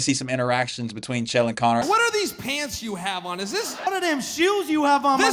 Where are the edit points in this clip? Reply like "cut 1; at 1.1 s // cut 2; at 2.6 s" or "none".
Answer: cut 1; at 1.8 s // cut 2; at 3.9 s